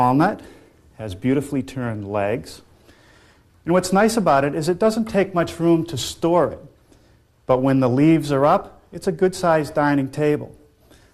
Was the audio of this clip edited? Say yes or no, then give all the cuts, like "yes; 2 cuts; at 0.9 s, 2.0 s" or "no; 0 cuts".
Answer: yes; 1 cut; at 6.1 s